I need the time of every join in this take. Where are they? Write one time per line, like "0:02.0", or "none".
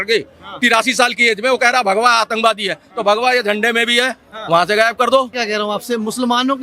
0:05.4